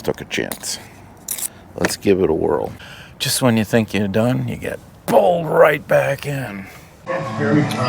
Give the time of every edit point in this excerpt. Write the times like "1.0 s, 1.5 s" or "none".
2.7 s, 7.0 s

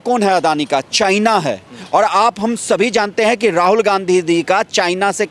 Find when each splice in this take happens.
none

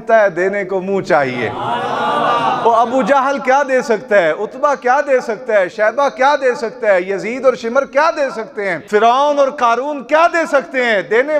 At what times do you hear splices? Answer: 8.8 s

